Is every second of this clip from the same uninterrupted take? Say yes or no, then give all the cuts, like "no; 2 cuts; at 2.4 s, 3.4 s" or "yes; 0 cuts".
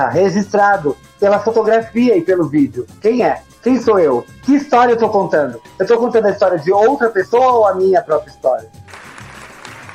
yes; 0 cuts